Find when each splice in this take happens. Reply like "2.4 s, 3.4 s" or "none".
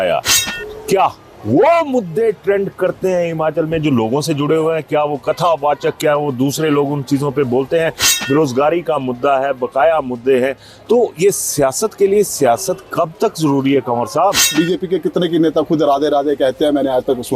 14.5 s